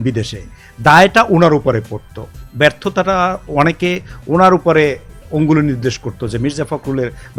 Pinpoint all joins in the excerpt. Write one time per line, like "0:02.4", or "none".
none